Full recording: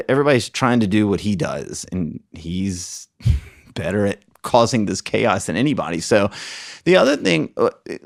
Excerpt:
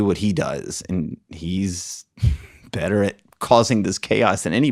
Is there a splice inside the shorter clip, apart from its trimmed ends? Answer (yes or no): no